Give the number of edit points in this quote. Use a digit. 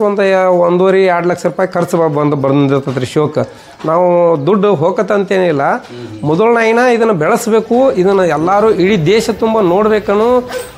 0